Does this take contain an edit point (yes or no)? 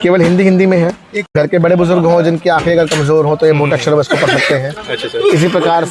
no